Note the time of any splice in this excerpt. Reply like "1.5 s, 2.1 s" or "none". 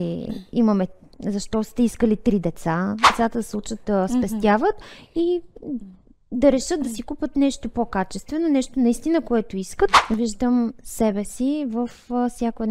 3.1 s, 10.0 s